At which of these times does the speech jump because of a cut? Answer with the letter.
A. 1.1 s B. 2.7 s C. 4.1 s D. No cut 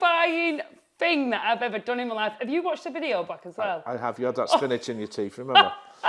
D